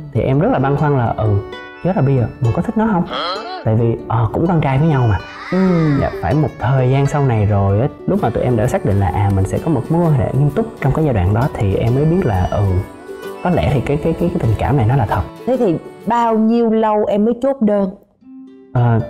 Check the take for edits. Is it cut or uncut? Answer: uncut